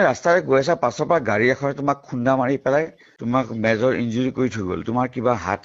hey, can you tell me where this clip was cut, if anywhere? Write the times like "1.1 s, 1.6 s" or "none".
3.1 s